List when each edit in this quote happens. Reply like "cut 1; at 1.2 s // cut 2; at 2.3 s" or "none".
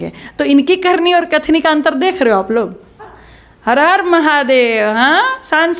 cut 1; at 3.1 s